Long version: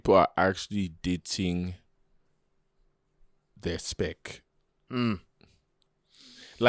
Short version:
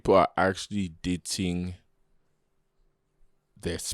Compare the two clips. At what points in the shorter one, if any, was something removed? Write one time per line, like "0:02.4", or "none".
none